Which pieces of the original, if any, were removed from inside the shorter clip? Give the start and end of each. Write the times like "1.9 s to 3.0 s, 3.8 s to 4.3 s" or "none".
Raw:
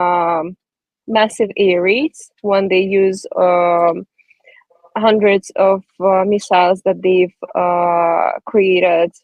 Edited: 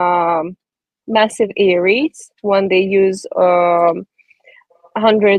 none

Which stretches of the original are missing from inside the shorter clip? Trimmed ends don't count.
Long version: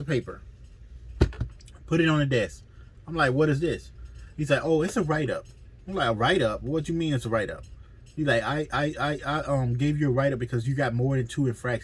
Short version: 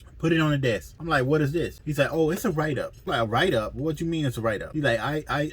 2.6 s to 3.0 s, 3.9 s to 4.3 s, 5.5 s to 5.8 s, 7.5 s to 8.1 s

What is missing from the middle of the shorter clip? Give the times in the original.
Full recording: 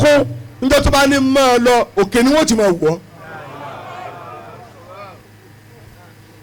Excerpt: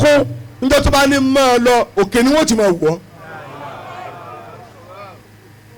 none

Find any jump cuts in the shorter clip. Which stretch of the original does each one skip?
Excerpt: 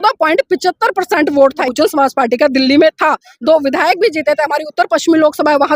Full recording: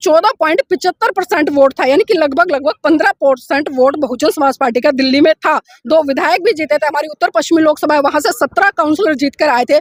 1.9 s to 4.1 s

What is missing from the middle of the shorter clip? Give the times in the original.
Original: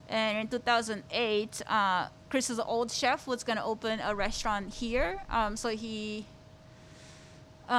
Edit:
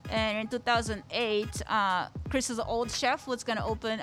none

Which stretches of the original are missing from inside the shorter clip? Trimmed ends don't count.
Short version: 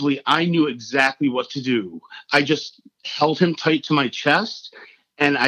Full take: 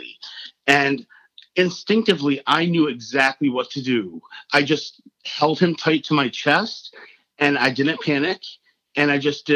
none

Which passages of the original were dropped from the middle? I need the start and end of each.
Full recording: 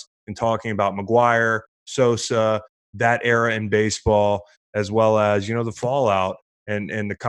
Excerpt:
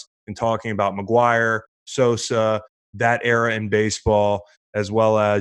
none

